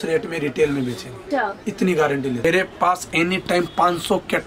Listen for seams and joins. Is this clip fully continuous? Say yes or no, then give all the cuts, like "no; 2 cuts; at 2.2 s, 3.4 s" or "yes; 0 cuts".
no; 1 cut; at 2.4 s